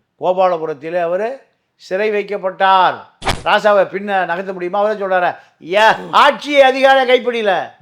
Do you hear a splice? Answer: yes; 1 cut; at 3.3 s

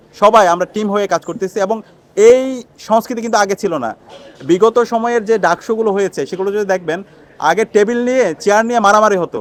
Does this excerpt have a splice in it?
no; 0 cuts

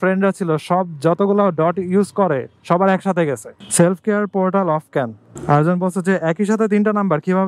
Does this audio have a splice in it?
yes; 1 cut; at 3.6 s

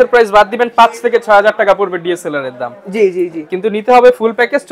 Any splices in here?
no; 0 cuts

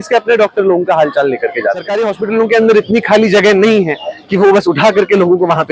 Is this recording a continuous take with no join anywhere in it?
no; 1 cut; at 1.9 s

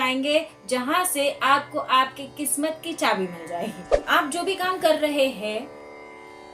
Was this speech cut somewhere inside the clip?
yes; 1 cut; at 3.9 s

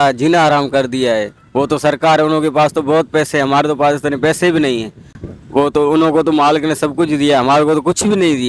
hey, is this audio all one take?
yes; 0 cuts

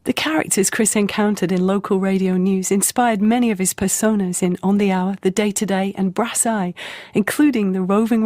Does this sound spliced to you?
yes; 1 cut; at 4.7 s

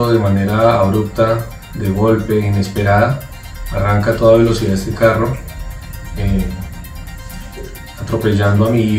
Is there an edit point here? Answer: no; 0 cuts

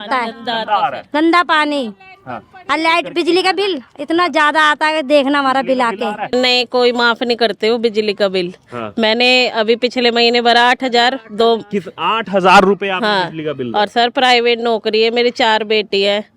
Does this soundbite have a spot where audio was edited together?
yes; 1 cut; at 6.3 s

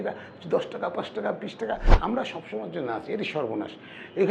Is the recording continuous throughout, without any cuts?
no; 1 cut; at 1.9 s

